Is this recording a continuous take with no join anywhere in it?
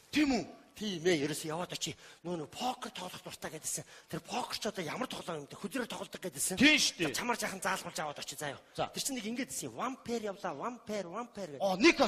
no; 1 cut; at 0.9 s

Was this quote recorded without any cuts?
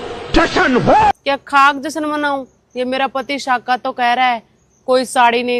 yes; 0 cuts

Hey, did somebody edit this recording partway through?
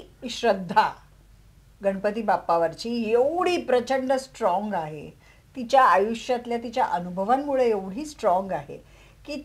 no; 0 cuts

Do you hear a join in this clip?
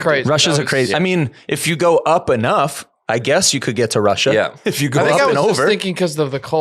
no; 0 cuts

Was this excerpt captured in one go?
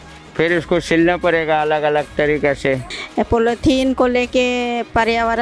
no; 1 cut; at 3.0 s

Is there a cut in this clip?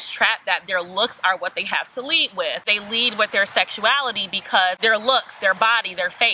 yes; 2 cuts; at 2.7 s, 4.8 s

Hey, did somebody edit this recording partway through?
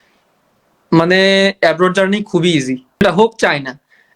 yes; 1 cut; at 3.0 s

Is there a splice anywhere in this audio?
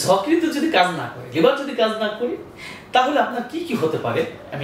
no; 0 cuts

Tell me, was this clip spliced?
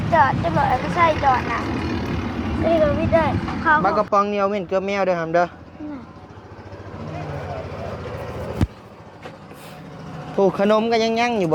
yes; 1 cut; at 3.8 s

